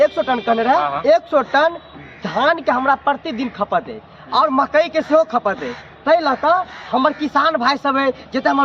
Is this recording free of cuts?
yes; 0 cuts

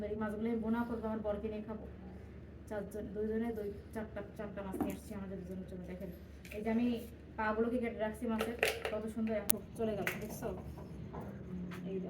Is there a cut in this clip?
yes; 1 cut; at 9.5 s

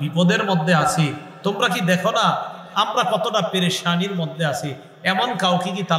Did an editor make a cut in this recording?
no; 0 cuts

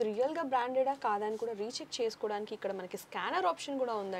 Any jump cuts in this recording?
no; 0 cuts

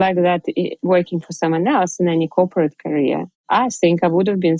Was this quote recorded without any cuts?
no; 1 cut; at 3.4 s

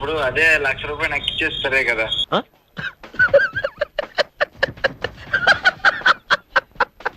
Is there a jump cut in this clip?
no; 0 cuts

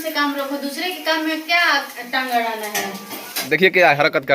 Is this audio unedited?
no; 1 cut; at 3.4 s

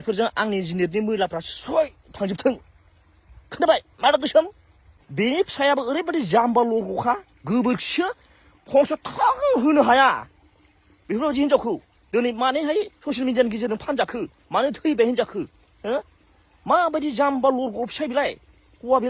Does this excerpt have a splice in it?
no; 0 cuts

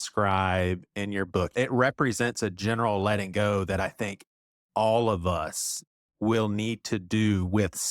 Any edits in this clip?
yes; 1 cut; at 1.5 s

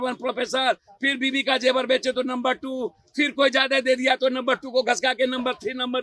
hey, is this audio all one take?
yes; 0 cuts

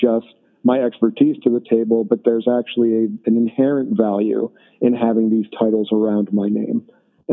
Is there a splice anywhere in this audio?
no; 0 cuts

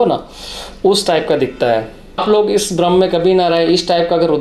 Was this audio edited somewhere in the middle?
yes; 1 cut; at 2.2 s

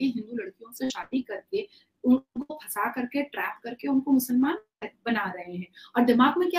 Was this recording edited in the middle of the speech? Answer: no; 0 cuts

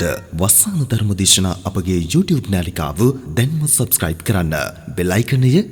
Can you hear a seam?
no; 0 cuts

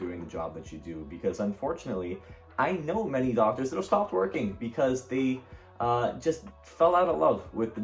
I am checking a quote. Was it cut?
no; 0 cuts

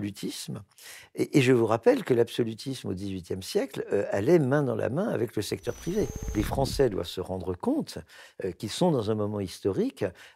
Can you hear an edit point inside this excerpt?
yes; 1 cut; at 6.3 s

